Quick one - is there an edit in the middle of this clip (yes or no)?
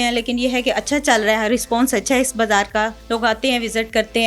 yes